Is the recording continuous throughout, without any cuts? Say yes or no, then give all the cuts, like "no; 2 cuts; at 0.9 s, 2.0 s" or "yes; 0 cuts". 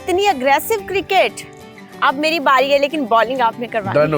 yes; 0 cuts